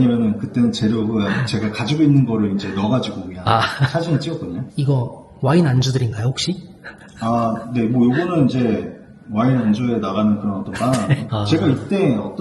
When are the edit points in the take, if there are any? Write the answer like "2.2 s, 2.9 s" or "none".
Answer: 4.6 s, 11.3 s